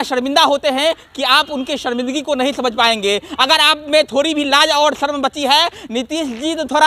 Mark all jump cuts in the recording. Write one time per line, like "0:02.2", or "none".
none